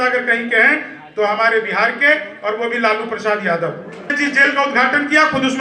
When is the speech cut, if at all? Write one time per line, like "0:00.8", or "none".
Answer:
0:04.1